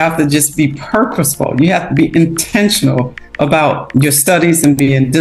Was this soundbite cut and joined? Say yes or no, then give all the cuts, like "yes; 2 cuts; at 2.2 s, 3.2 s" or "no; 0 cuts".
no; 0 cuts